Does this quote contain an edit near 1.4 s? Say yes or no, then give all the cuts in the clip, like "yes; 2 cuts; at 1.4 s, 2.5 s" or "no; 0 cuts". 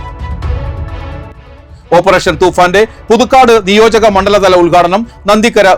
yes; 1 cut; at 1.4 s